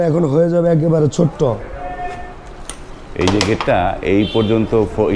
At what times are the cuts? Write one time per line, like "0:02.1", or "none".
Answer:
none